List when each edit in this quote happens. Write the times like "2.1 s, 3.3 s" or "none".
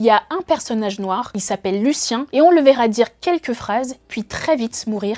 none